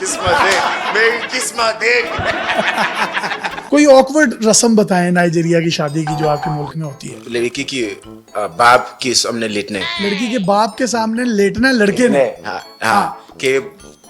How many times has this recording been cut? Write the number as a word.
one